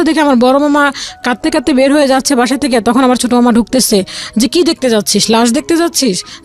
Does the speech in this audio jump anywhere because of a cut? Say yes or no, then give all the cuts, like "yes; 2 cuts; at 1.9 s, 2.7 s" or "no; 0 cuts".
no; 0 cuts